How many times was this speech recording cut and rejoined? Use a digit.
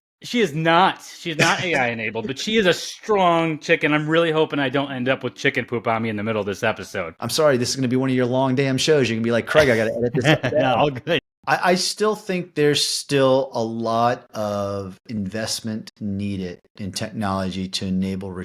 2